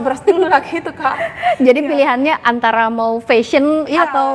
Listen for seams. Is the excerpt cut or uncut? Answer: uncut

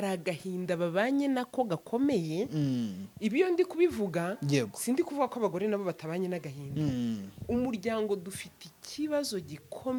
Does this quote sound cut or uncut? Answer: uncut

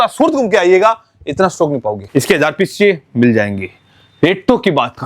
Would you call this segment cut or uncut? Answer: cut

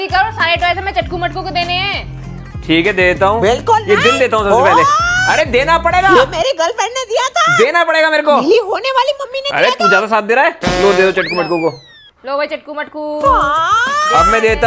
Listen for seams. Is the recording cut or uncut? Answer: uncut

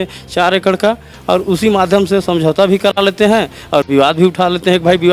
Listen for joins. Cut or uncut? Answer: uncut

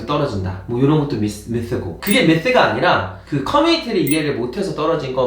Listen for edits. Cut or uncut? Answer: cut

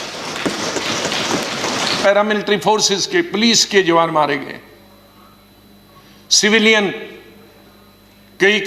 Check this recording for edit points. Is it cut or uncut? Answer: cut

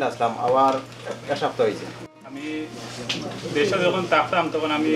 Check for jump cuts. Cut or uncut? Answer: cut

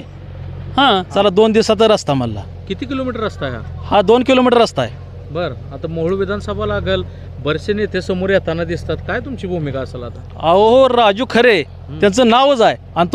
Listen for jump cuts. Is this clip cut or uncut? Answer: cut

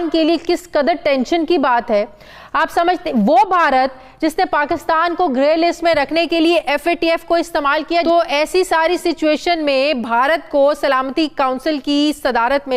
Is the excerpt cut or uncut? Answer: cut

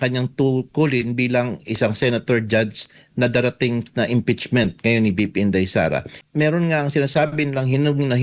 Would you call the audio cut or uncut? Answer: cut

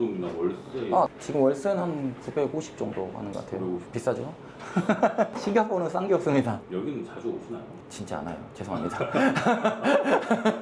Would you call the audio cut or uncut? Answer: cut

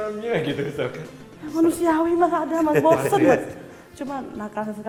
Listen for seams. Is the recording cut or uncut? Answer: uncut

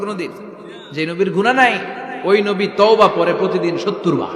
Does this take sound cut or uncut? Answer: uncut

